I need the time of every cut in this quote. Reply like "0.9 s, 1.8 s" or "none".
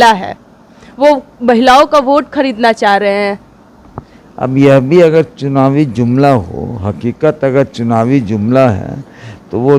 none